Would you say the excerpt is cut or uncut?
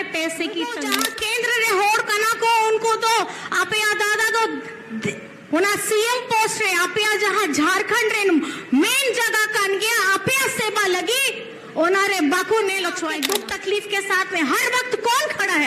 cut